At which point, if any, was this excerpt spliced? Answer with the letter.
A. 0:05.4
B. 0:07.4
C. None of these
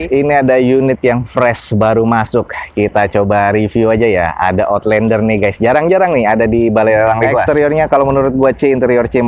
B